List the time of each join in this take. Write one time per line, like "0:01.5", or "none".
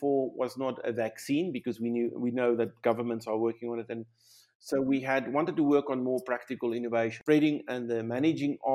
0:07.2